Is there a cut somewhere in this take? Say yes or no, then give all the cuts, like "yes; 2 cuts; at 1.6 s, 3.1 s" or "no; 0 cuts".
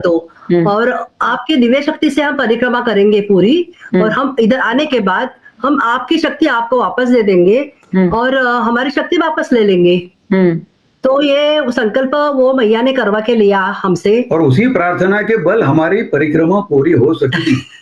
no; 0 cuts